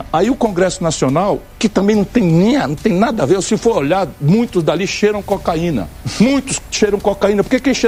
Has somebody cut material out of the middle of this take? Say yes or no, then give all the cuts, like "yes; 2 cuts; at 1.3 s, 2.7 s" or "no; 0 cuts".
no; 0 cuts